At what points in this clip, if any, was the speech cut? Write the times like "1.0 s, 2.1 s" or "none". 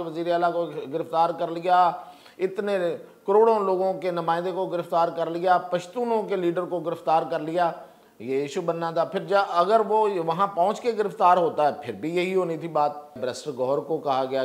13.2 s

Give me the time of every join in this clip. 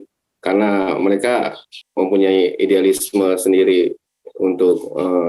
1.8 s

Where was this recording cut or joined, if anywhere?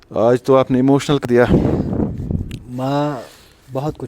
1.2 s

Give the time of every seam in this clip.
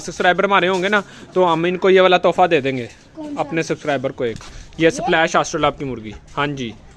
none

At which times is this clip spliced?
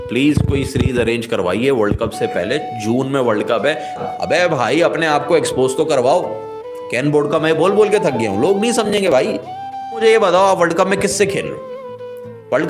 4.0 s, 10.0 s

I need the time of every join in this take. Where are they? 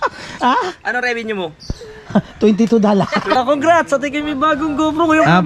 3.4 s

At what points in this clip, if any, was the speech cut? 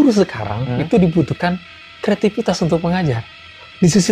none

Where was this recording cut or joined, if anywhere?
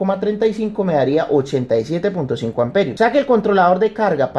2.9 s

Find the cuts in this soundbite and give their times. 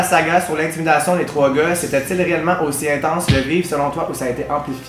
none

